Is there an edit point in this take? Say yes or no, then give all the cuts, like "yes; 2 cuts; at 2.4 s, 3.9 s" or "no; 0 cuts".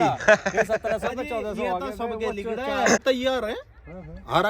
yes; 1 cut; at 3.0 s